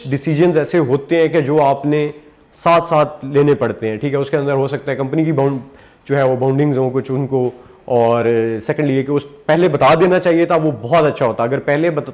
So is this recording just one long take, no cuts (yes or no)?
yes